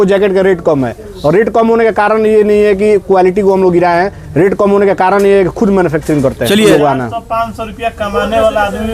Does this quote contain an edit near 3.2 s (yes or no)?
no